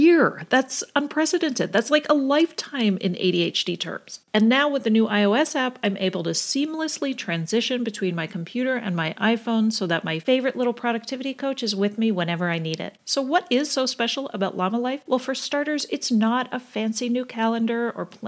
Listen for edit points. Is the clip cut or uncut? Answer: uncut